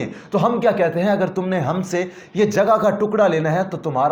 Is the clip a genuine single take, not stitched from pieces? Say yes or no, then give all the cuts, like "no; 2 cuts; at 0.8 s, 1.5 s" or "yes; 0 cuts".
yes; 0 cuts